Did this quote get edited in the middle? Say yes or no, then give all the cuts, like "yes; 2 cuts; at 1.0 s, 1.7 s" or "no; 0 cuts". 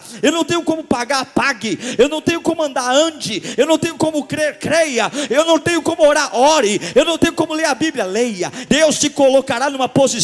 yes; 1 cut; at 8.6 s